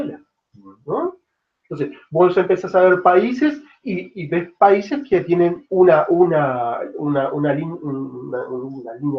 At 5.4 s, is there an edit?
yes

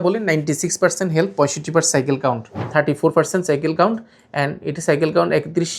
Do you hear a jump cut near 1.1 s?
no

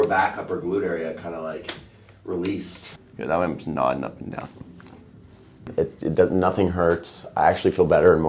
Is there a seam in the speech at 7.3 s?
no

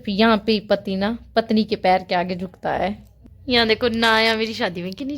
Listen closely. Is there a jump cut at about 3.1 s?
yes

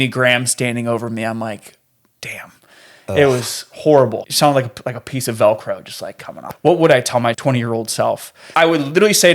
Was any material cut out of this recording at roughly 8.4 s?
yes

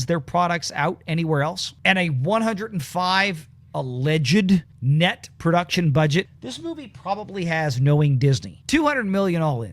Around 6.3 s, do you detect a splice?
yes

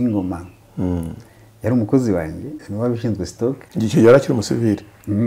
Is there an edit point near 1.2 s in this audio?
no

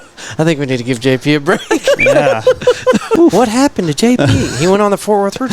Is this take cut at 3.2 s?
yes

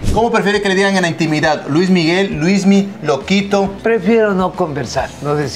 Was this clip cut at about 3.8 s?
yes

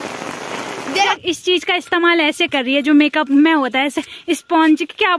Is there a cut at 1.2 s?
yes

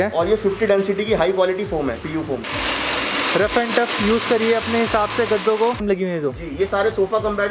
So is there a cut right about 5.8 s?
yes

